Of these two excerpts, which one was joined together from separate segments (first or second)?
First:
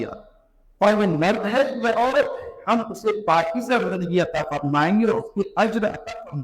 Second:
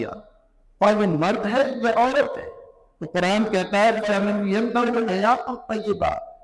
first